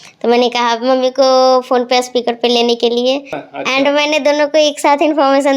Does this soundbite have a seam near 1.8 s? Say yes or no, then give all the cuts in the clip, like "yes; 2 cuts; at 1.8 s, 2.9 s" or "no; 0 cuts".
no; 1 cut; at 3.4 s